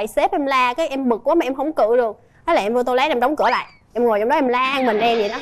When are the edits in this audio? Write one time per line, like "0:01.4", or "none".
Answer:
none